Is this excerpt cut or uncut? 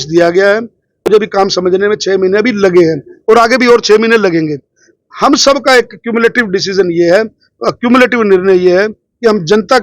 cut